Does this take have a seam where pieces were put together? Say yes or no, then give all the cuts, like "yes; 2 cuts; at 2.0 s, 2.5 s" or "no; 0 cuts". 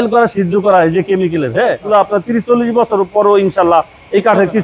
yes; 1 cut; at 1.9 s